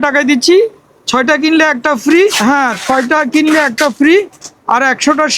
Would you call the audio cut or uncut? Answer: cut